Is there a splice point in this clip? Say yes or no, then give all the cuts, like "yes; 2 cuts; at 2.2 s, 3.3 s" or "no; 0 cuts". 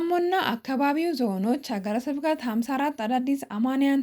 no; 0 cuts